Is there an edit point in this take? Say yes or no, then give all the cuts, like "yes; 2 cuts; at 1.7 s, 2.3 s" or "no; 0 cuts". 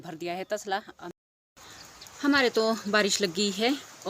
yes; 1 cut; at 1.0 s